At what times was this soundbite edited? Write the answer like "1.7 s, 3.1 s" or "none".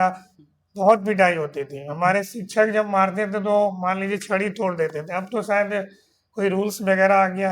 none